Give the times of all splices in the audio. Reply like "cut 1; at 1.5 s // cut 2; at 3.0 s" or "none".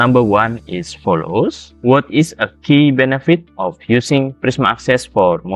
cut 1; at 1.7 s